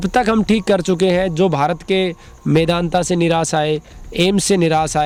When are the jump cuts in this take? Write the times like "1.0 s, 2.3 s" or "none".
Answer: none

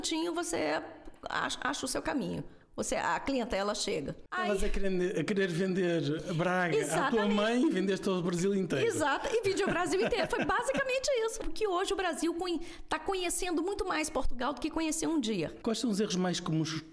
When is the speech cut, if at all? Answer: 4.2 s, 11.4 s, 15.6 s

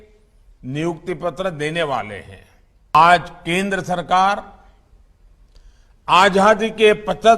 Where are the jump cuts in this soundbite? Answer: 2.9 s

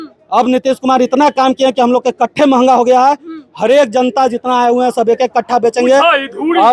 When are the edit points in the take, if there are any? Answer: none

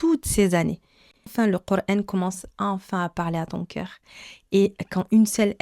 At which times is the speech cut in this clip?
1.3 s

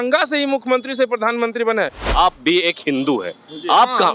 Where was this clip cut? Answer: 2.0 s

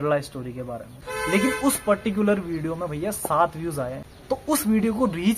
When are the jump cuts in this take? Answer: 1.1 s, 4.1 s

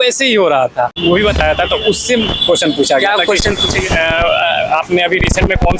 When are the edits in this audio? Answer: 1.0 s

